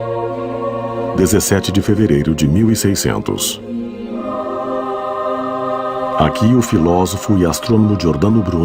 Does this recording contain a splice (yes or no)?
no